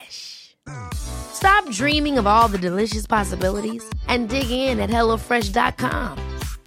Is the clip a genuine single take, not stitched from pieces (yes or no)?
yes